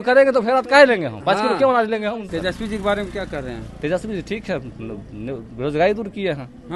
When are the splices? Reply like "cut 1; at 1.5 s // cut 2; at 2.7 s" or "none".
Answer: cut 1; at 2.3 s